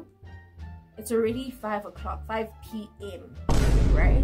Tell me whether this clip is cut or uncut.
cut